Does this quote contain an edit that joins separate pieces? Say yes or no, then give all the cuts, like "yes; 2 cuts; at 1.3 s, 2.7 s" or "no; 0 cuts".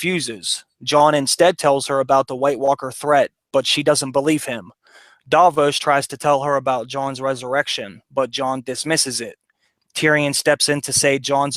no; 0 cuts